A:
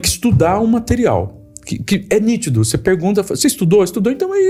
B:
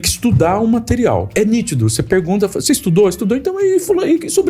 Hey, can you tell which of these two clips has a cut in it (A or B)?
B